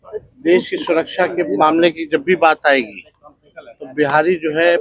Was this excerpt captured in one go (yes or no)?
yes